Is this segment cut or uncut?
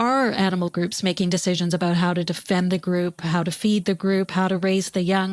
cut